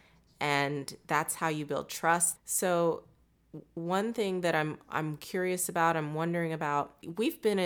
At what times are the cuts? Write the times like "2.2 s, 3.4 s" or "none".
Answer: 2.3 s

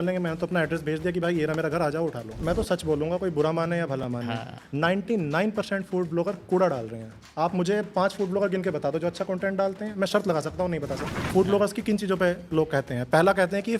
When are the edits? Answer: 2.4 s, 11.3 s

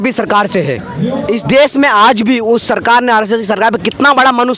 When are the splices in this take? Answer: 1.1 s

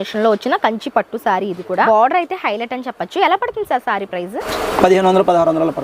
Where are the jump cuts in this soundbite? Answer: 1.9 s, 4.5 s

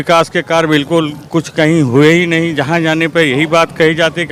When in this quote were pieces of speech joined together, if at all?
none

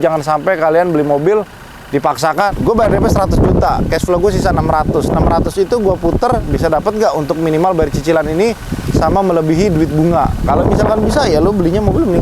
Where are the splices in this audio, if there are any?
2.5 s

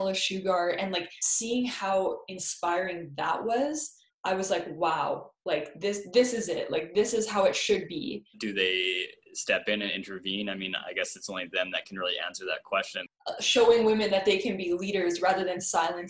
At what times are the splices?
8.4 s, 13.1 s

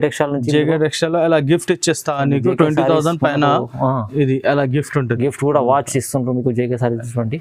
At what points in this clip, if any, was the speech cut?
none

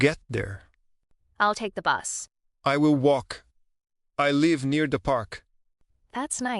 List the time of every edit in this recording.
none

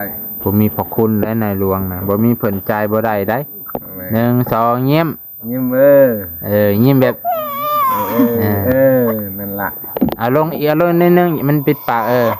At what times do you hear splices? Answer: none

